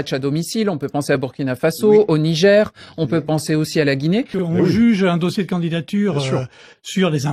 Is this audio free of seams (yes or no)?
no